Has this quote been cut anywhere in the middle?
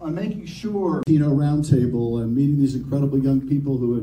no; 0 cuts

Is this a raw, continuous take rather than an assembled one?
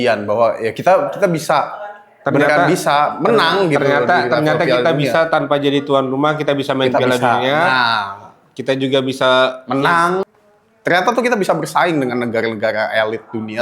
no; 1 cut; at 10.2 s

